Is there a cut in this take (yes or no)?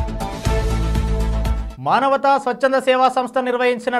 yes